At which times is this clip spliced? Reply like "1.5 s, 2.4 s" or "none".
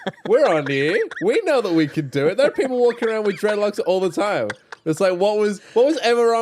none